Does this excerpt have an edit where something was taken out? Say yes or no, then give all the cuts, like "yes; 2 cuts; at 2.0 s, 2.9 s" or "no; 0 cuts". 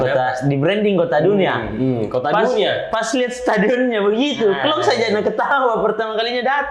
no; 0 cuts